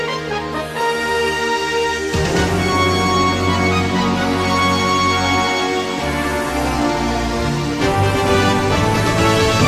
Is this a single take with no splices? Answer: yes; 0 cuts

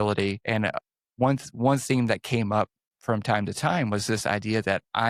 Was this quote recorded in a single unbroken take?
no; 2 cuts; at 0.9 s, 2.9 s

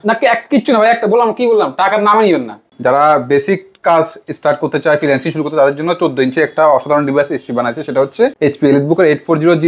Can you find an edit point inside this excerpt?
yes; 2 cuts; at 2.6 s, 8.3 s

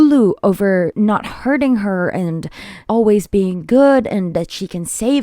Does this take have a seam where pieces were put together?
yes; 2 cuts; at 0.9 s, 2.8 s

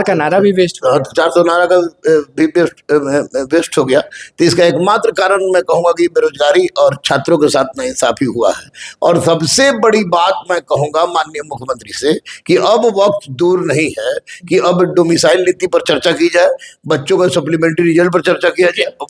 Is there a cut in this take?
no; 0 cuts

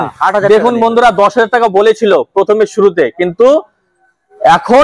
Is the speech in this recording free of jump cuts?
yes; 0 cuts

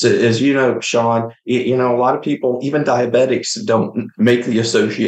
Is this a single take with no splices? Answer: no; 1 cut; at 1.4 s

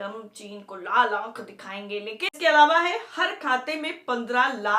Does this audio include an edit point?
yes; 1 cut; at 2.3 s

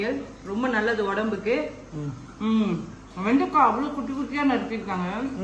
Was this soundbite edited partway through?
no; 0 cuts

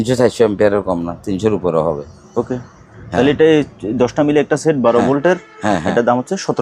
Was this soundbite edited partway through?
no; 0 cuts

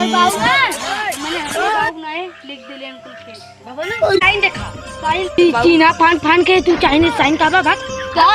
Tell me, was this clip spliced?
yes; 1 cut; at 4.2 s

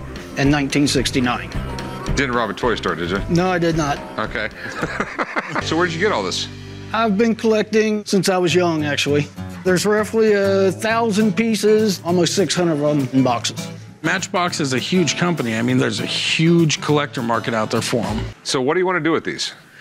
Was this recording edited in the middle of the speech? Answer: yes; 2 cuts; at 5.6 s, 18.4 s

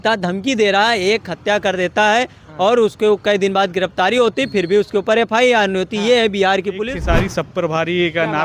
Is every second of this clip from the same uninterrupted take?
no; 1 cut; at 6.9 s

